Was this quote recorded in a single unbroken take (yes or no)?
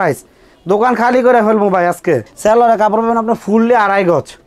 no